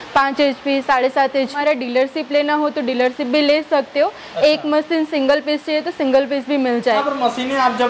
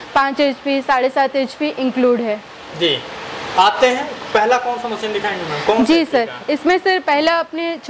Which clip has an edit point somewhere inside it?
first; 2 cuts; at 1.5 s, 7.0 s

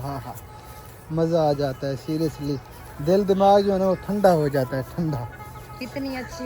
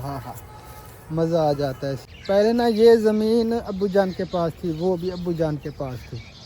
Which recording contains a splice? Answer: second; 1 cut; at 2.0 s

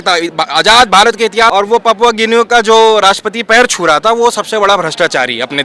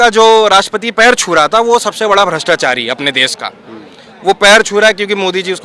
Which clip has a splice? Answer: first; 1 cut; at 1.5 s

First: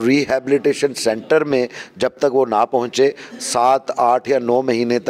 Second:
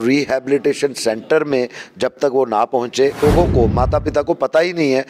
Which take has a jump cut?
second; 1 cut; at 3.2 s

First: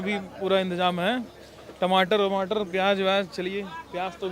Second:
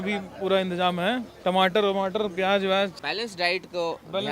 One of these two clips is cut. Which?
second; 2 cuts; at 1.3 s, 3.0 s

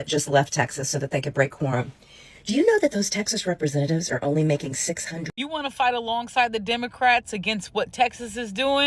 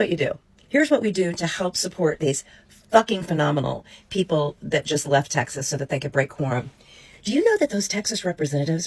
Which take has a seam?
first; 1 cut; at 5.2 s

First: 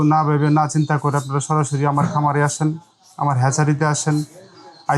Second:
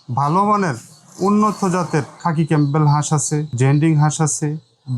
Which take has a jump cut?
second; 2 cuts; at 2.1 s, 3.5 s

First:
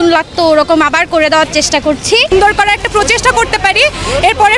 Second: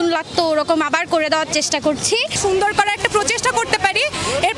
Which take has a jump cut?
first; 1 cut; at 2.3 s

